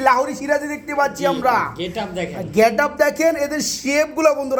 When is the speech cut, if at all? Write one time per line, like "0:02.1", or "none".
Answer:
none